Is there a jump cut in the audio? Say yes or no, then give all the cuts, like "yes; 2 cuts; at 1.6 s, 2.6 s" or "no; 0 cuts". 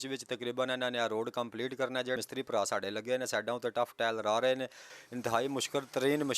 yes; 2 cuts; at 2.2 s, 4.9 s